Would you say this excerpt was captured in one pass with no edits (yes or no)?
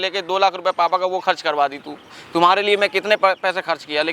yes